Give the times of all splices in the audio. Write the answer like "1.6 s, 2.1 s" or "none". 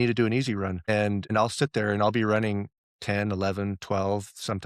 1.3 s